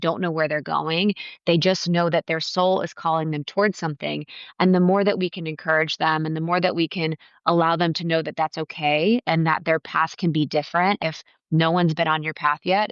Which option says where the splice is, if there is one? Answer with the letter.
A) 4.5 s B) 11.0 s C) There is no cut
B